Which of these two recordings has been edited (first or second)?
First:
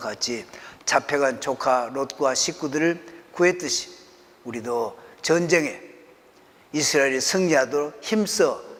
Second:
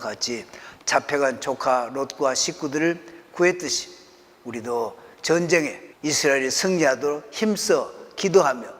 second